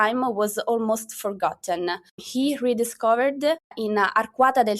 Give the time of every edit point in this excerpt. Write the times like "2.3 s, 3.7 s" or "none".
2.2 s, 3.8 s